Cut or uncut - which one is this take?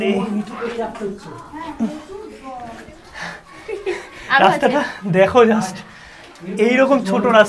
uncut